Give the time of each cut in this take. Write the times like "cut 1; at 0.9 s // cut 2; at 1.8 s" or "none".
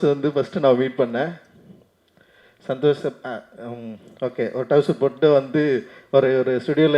none